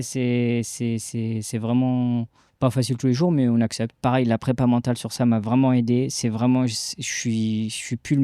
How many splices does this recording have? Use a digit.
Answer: 1